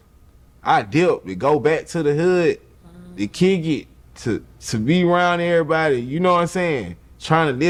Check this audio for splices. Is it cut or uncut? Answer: uncut